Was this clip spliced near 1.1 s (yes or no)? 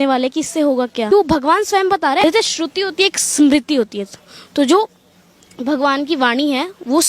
yes